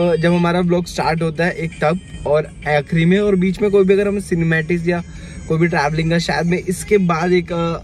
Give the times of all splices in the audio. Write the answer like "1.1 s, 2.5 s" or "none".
none